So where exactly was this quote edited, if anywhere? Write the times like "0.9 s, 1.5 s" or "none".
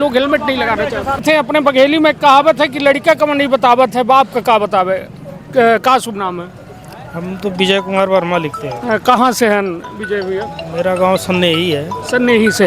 1.2 s